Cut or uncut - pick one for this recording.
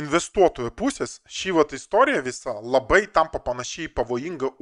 uncut